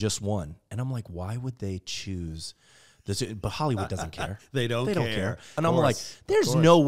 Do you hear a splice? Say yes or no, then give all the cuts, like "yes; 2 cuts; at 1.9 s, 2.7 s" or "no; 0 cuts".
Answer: yes; 1 cut; at 5.6 s